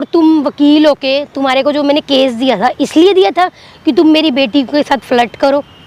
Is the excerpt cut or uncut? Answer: uncut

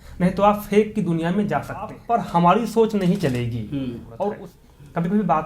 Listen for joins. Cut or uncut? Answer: cut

